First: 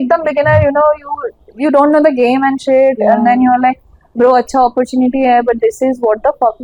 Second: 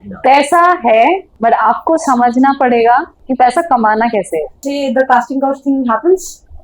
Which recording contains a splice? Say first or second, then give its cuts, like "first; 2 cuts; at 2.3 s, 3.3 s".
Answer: second; 3 cuts; at 1.3 s, 3.2 s, 4.6 s